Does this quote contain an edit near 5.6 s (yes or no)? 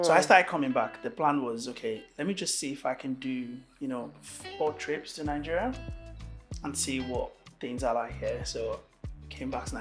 no